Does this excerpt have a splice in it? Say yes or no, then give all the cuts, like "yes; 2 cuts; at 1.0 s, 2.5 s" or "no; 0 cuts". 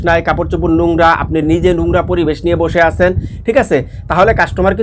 no; 0 cuts